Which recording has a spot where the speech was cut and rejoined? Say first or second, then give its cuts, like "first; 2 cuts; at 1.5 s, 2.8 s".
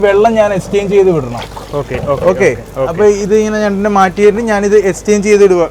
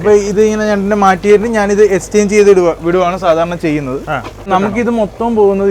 second; 1 cut; at 4.5 s